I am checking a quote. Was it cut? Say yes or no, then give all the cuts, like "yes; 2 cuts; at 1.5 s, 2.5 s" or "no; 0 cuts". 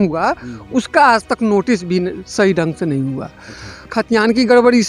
yes; 1 cut; at 3.9 s